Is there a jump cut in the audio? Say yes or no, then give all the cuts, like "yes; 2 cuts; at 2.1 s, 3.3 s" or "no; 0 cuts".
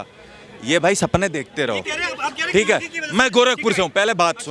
no; 0 cuts